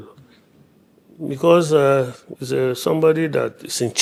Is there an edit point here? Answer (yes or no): no